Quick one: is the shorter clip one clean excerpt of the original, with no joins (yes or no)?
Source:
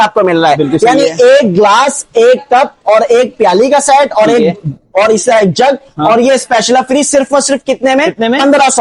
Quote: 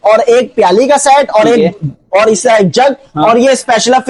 yes